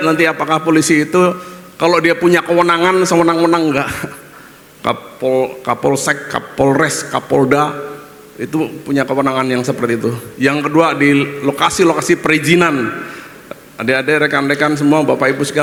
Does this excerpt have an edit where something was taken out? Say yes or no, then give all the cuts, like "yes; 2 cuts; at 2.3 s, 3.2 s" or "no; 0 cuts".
no; 0 cuts